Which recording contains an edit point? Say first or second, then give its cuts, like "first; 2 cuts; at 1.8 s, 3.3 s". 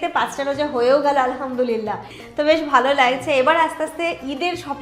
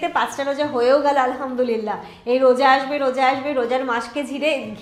first; 1 cut; at 2.1 s